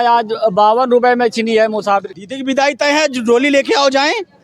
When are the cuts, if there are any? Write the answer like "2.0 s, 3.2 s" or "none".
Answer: 2.1 s